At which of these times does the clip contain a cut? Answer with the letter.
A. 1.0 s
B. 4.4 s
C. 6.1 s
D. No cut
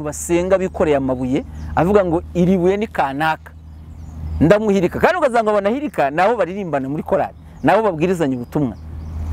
D